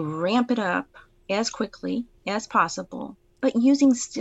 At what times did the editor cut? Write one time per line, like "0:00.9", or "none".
0:02.1

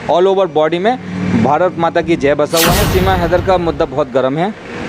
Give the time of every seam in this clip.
0:02.8

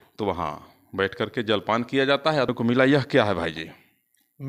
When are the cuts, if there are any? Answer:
0:02.5

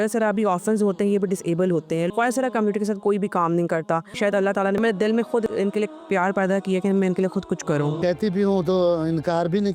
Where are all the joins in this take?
0:02.1
0:04.3
0:05.5
0:08.0

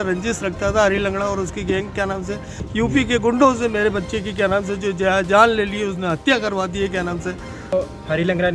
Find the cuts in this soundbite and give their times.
0:02.6
0:07.7

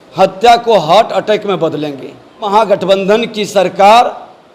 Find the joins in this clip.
0:02.5

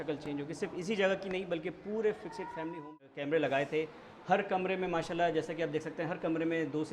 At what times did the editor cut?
0:02.8

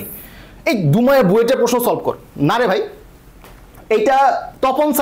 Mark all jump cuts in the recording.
none

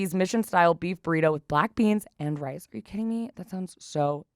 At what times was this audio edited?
none

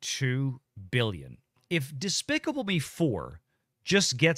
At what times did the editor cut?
0:01.6

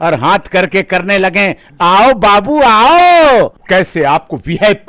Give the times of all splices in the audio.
0:03.6

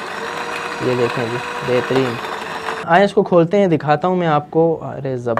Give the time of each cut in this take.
0:02.8

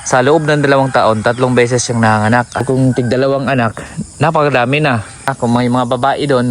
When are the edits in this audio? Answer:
0:02.6
0:05.3

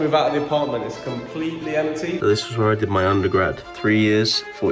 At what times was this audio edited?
0:02.2
0:03.7

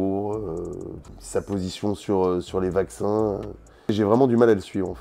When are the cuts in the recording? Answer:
0:03.9

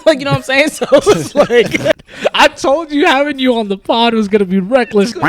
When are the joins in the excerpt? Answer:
0:02.0

